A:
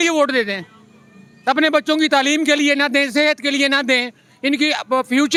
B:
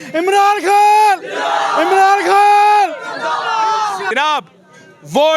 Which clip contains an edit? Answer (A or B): B